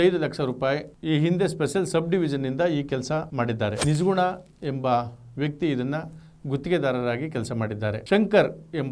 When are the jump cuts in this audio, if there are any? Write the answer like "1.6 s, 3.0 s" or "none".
8.0 s